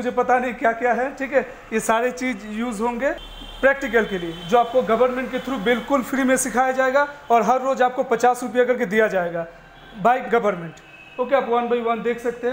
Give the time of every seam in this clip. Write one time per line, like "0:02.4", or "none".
none

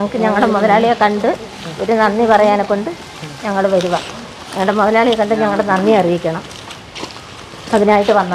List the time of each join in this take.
none

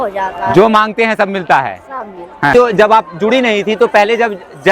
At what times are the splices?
0:02.5

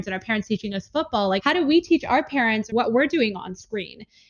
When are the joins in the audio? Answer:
0:02.7

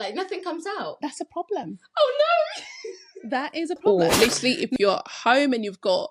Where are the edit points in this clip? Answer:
0:03.8

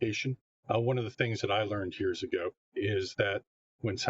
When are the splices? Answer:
0:02.6

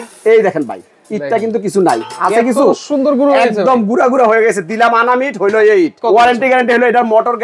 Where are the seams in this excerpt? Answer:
0:06.0

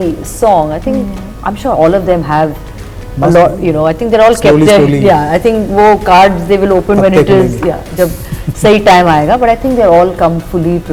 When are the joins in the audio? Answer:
none

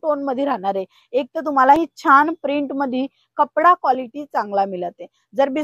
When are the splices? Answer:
0:01.8

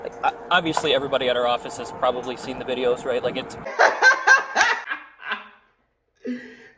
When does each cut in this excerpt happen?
0:03.7

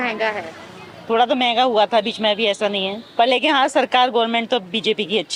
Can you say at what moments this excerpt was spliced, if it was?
none

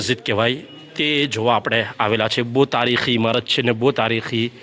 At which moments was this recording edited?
none

